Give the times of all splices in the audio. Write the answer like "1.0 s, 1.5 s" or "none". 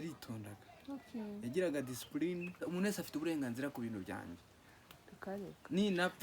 2.6 s